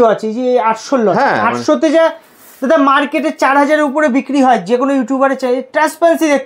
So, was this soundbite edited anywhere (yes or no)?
no